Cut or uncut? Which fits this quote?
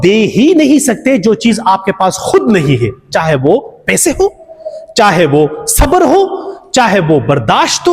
uncut